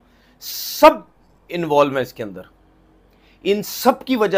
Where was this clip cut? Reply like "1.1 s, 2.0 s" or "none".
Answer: none